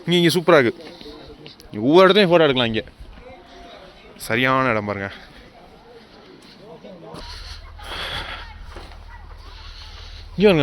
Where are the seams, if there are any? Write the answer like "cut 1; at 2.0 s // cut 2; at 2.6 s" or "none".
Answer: cut 1; at 7.2 s